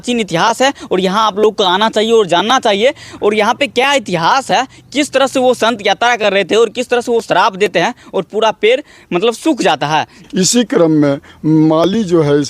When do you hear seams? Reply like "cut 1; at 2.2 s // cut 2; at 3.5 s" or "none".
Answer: cut 1; at 10.1 s